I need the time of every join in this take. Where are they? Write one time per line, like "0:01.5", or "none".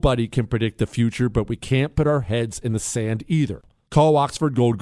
0:03.6